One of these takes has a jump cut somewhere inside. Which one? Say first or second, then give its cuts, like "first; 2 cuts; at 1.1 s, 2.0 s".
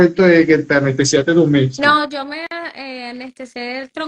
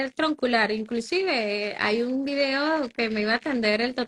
first; 1 cut; at 2.5 s